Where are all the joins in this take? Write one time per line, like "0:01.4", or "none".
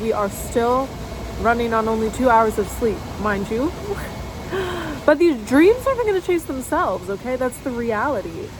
none